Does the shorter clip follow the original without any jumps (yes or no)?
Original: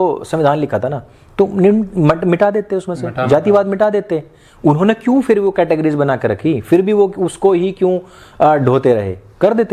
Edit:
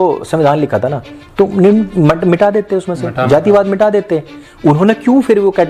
yes